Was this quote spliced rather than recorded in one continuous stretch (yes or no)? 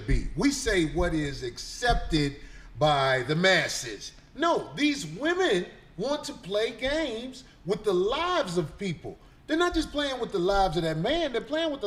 no